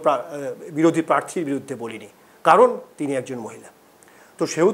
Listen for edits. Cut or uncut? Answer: uncut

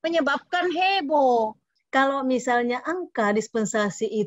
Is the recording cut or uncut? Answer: cut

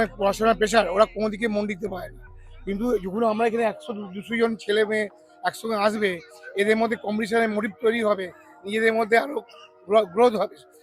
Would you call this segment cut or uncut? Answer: uncut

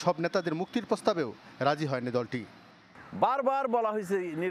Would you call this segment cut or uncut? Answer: uncut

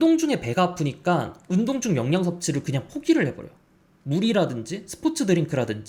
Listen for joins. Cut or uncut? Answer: uncut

